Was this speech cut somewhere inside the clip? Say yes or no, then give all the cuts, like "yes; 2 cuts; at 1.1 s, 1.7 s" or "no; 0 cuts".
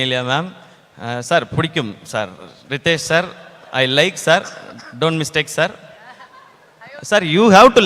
no; 0 cuts